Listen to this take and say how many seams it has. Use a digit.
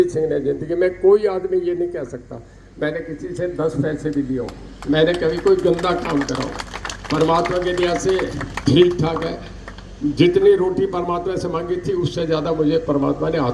0